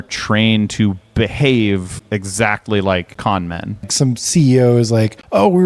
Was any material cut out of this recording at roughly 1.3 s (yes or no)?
no